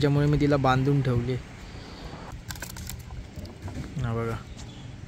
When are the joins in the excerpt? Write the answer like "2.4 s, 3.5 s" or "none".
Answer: 2.3 s